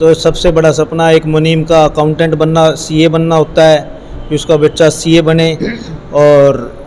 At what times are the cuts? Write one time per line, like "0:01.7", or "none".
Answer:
none